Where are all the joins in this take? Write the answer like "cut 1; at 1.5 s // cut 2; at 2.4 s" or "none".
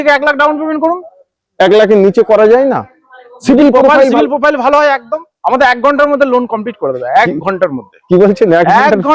none